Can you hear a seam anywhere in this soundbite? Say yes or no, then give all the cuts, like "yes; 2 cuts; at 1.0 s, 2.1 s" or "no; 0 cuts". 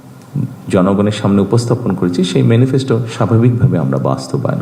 no; 0 cuts